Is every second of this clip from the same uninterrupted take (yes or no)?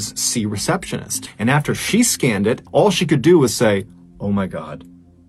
no